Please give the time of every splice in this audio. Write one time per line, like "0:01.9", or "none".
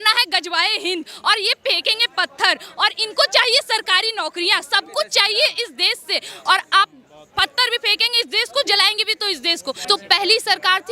0:09.8